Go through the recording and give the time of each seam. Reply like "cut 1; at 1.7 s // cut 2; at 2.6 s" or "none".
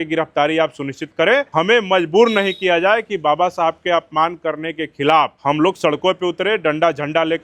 cut 1; at 1.5 s // cut 2; at 5.3 s